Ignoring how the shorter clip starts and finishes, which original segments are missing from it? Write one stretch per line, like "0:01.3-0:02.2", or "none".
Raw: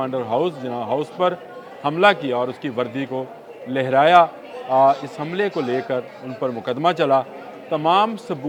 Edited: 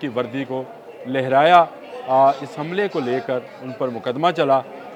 none